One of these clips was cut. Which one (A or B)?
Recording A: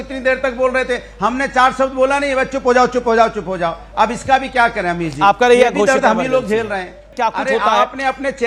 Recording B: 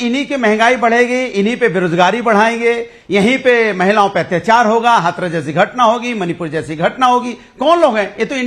A